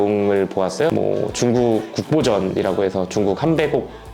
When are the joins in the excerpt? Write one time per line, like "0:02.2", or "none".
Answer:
0:00.9